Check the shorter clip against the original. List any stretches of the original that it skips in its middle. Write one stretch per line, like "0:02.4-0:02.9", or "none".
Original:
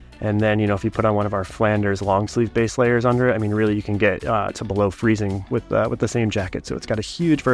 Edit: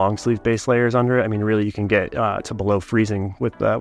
none